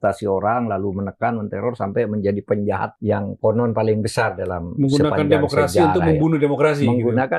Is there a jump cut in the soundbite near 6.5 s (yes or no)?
no